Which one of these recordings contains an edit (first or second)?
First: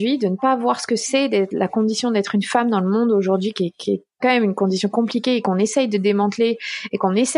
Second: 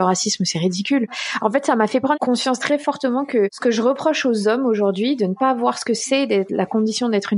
second